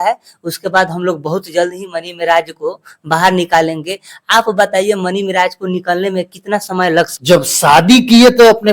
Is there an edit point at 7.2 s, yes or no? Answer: yes